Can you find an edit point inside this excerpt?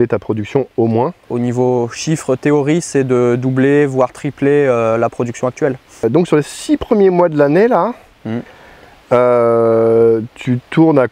yes; 2 cuts; at 1.2 s, 6.0 s

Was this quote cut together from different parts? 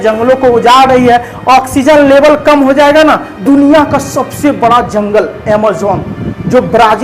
yes; 1 cut; at 3.3 s

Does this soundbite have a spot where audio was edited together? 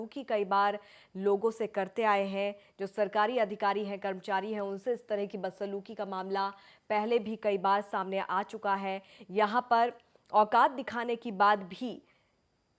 no; 0 cuts

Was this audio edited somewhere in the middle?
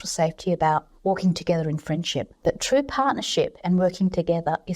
yes; 2 cuts; at 0.9 s, 2.4 s

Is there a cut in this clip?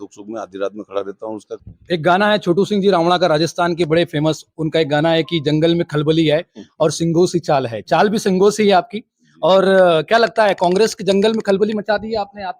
yes; 1 cut; at 1.5 s

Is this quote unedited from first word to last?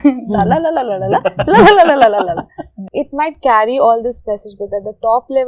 no; 1 cut; at 2.8 s

